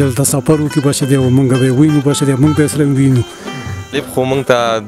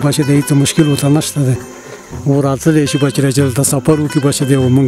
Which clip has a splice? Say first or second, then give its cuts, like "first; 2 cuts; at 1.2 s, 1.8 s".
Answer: first; 1 cut; at 3.9 s